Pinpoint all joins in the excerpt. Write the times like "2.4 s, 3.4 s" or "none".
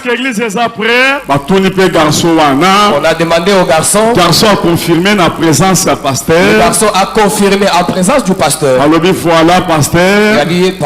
1.2 s